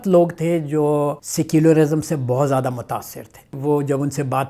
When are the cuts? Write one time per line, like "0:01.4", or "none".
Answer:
0:01.3
0:03.6